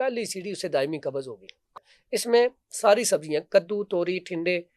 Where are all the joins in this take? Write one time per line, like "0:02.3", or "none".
0:01.7